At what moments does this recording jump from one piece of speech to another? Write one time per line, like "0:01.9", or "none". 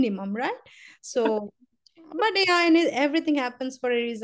none